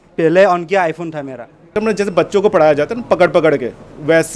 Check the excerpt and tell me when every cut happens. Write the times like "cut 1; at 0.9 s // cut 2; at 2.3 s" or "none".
cut 1; at 1.7 s